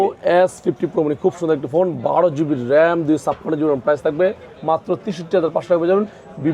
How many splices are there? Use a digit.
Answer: 0